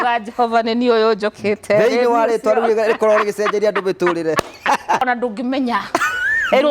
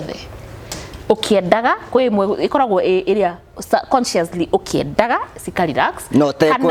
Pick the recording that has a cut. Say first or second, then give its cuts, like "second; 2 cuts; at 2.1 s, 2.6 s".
first; 1 cut; at 5.0 s